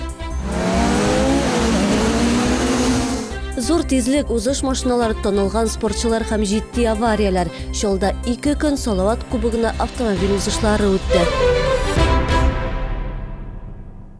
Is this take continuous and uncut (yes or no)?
no